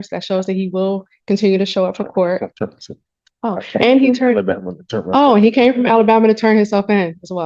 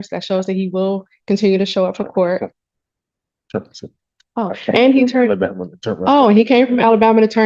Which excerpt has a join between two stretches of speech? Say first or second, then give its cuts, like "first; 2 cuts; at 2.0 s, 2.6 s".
first; 1 cut; at 2.5 s